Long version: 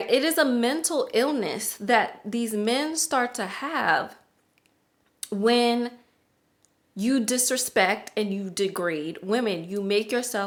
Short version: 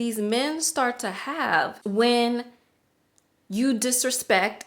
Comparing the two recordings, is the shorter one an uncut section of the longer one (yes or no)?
no